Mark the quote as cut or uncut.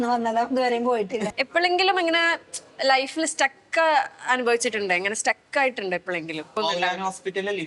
cut